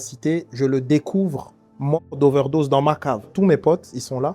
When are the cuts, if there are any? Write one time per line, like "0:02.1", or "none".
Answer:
0:03.3